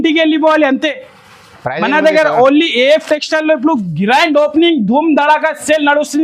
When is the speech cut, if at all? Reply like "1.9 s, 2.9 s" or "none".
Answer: none